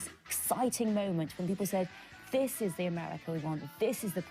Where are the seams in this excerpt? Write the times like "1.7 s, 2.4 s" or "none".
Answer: none